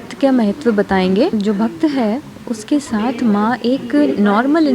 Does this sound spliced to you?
yes; 1 cut; at 1.3 s

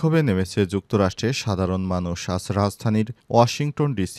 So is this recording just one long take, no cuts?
yes; 0 cuts

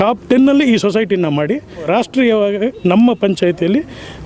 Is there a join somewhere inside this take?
yes; 1 cut; at 1.8 s

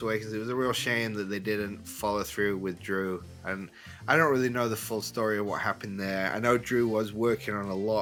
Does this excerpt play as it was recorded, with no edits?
yes; 0 cuts

